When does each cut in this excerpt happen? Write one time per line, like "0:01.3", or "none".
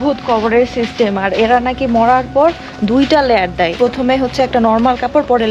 0:03.7